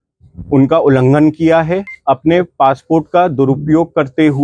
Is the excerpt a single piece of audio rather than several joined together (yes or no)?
no